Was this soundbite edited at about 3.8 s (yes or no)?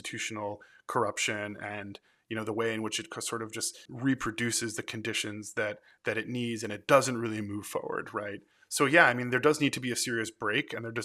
yes